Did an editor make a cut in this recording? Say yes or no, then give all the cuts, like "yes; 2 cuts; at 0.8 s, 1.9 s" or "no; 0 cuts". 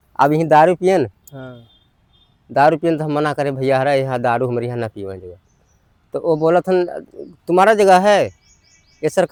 no; 0 cuts